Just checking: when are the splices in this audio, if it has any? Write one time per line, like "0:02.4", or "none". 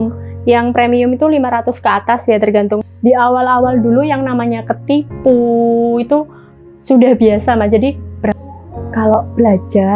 0:02.9
0:08.3